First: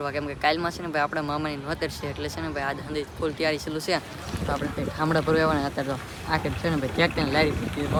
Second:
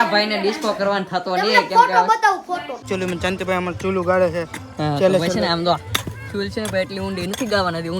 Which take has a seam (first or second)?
second